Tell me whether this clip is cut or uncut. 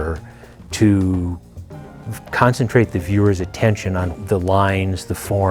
cut